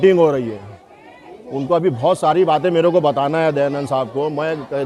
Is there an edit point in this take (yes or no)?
no